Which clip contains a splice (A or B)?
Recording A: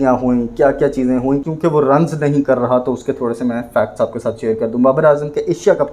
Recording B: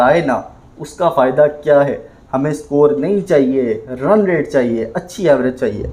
A